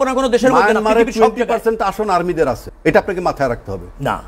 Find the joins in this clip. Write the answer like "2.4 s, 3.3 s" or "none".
2.7 s